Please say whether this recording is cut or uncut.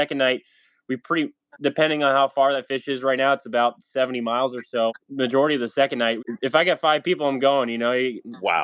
cut